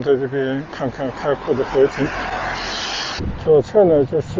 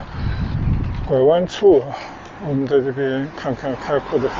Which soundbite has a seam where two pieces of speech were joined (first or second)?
first